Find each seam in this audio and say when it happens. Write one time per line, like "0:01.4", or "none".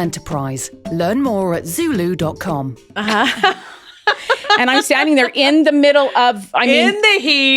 0:02.9